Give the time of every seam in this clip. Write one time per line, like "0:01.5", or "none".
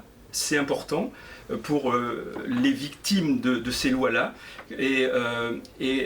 none